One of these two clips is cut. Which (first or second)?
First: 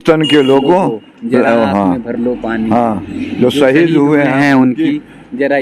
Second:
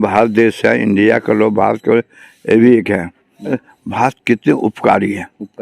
second